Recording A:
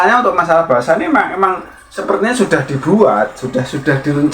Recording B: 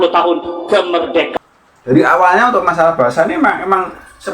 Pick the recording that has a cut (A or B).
B